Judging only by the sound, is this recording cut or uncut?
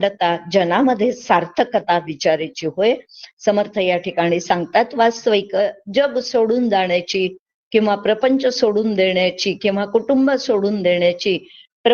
uncut